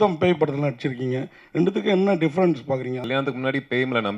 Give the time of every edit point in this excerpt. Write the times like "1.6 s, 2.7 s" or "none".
3.0 s